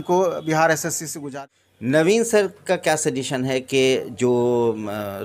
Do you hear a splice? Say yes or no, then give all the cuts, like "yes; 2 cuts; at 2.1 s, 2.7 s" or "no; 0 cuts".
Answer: yes; 1 cut; at 1.2 s